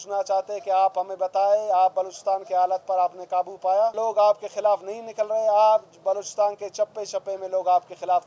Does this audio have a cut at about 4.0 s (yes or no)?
yes